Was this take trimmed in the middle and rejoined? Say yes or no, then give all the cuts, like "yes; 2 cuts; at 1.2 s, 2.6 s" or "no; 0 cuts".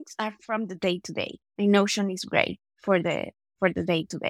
no; 0 cuts